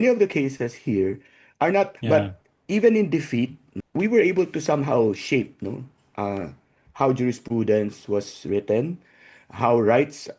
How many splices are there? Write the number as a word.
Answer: two